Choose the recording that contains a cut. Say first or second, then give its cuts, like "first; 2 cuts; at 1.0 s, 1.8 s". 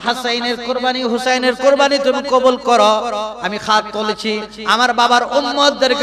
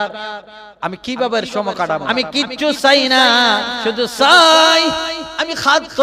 second; 1 cut; at 2.1 s